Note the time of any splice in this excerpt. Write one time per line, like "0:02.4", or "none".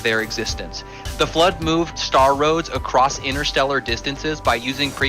0:01.0